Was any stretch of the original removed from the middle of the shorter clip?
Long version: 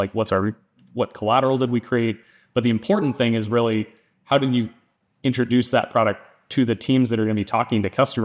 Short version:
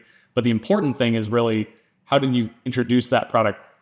yes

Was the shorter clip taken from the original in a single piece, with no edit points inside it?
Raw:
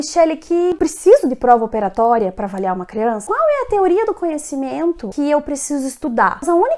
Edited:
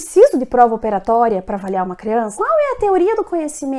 yes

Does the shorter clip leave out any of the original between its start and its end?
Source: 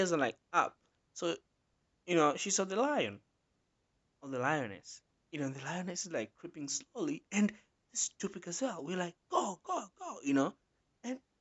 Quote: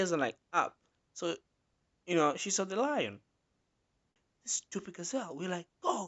yes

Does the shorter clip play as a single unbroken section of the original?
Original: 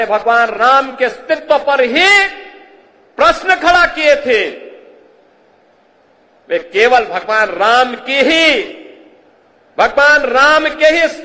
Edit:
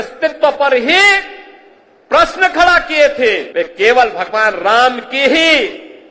no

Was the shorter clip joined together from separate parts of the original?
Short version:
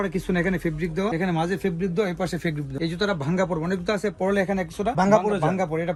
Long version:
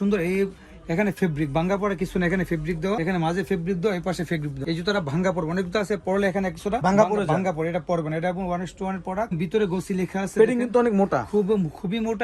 no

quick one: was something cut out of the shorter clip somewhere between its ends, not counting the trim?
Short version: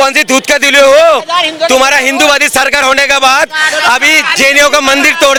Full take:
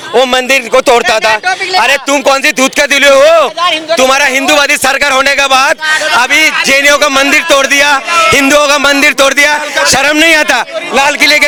no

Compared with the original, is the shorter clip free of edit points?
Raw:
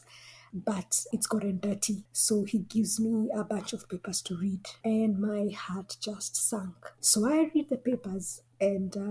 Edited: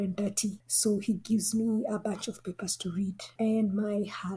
yes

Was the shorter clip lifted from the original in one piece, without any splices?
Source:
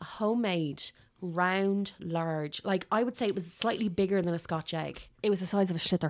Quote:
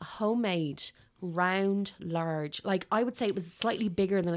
yes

